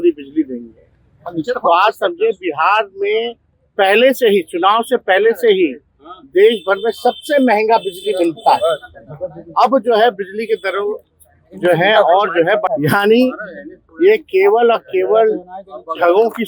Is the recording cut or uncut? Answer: cut